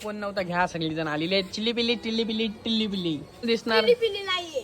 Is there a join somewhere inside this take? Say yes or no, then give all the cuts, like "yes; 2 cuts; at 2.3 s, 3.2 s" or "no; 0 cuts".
yes; 1 cut; at 3.5 s